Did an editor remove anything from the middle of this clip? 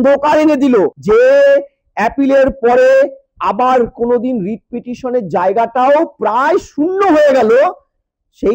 yes; 1 cut; at 1.0 s

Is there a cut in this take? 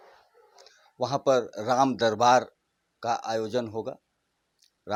no; 0 cuts

